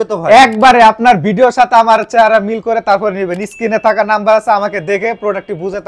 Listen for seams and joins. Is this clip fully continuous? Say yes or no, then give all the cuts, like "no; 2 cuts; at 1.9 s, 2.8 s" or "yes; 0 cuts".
yes; 0 cuts